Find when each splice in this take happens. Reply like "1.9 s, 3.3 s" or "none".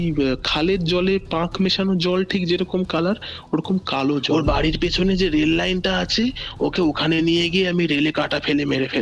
4.2 s